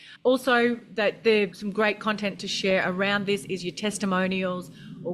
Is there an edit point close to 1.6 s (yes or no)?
yes